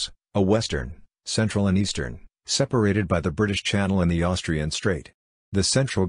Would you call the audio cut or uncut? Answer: uncut